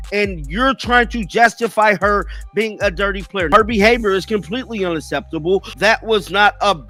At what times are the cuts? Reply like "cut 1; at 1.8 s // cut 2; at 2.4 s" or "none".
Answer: none

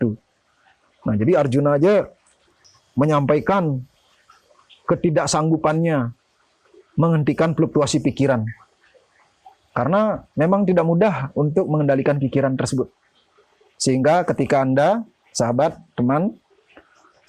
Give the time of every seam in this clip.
none

